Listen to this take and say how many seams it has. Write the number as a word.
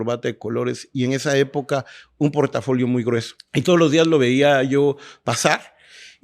one